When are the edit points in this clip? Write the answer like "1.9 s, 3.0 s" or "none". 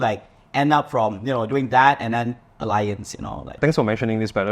3.6 s